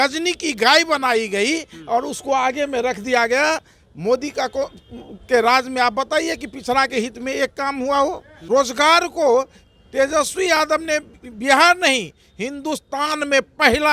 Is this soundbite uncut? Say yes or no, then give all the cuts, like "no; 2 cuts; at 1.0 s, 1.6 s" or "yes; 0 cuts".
no; 1 cut; at 8.3 s